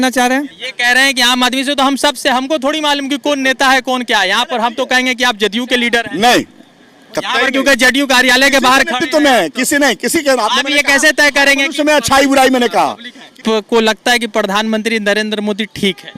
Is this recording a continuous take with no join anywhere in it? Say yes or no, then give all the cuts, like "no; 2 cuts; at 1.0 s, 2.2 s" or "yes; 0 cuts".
no; 1 cut; at 13.4 s